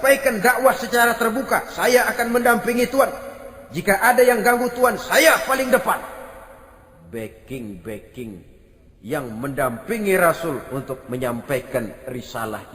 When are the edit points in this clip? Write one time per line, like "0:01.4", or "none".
none